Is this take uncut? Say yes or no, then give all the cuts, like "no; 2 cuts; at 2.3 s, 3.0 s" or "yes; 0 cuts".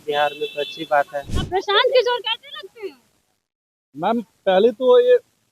no; 1 cut; at 1.4 s